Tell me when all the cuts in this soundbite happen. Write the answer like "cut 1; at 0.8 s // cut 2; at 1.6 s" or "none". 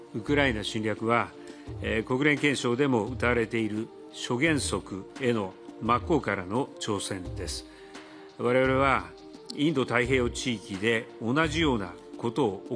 none